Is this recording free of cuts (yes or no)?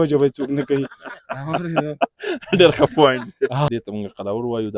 no